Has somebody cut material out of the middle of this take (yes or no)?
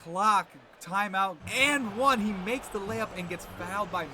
yes